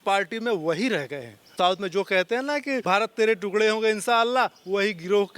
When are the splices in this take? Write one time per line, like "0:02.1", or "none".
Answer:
0:01.5
0:02.8